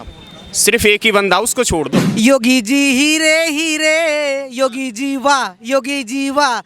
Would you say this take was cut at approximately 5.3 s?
no; 1 cut; at 2.0 s

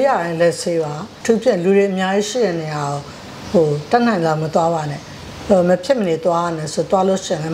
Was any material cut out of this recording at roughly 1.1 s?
yes; 1 cut; at 1.1 s

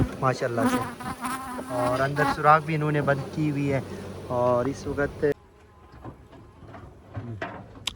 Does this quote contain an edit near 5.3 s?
yes; 1 cut; at 5.3 s

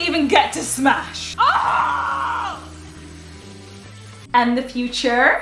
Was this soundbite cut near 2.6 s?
no; 2 cuts; at 1.2 s, 4.3 s

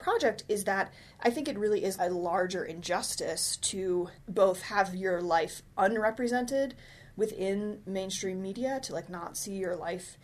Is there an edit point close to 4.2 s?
yes; 2 cuts; at 1.9 s, 4.2 s

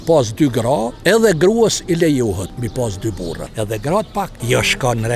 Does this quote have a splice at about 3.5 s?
yes; 4 cuts; at 0.9 s, 2.5 s, 3.5 s, 4.4 s

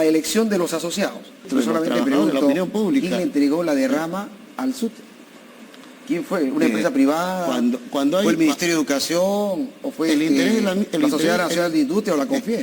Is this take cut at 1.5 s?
yes; 1 cut; at 1.5 s

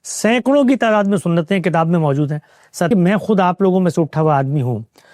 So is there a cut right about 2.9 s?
yes; 1 cut; at 2.9 s

